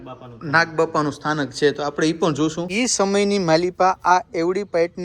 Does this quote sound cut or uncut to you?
cut